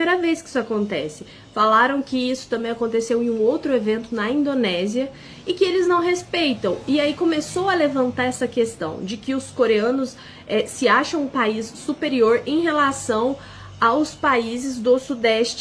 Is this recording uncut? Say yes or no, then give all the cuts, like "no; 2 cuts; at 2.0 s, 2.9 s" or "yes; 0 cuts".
yes; 0 cuts